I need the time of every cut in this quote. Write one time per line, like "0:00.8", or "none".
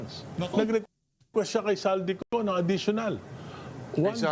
0:02.2